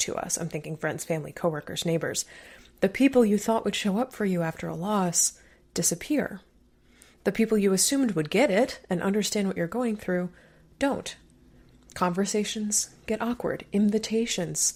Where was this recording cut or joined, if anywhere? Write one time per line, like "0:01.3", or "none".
none